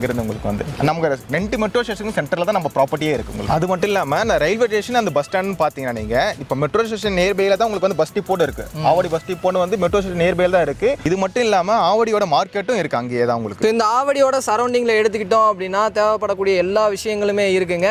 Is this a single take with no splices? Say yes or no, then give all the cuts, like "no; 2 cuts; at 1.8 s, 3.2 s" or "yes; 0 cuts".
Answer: yes; 0 cuts